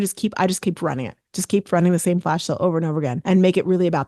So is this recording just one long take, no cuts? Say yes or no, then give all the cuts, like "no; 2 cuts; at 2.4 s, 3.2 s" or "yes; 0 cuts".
no; 1 cut; at 3.2 s